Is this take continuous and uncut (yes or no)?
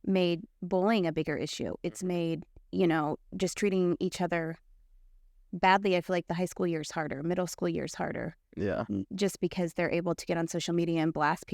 yes